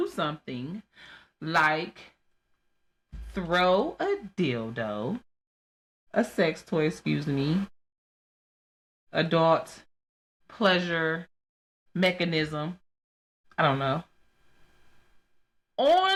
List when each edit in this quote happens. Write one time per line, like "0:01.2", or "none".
none